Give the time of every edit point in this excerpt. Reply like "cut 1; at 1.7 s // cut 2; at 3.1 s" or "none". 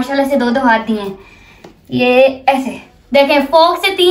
none

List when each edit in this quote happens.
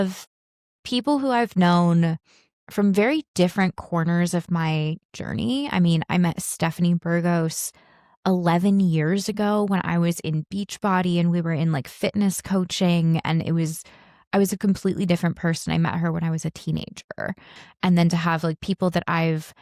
cut 1; at 17.6 s

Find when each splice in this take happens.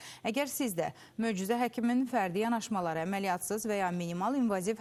none

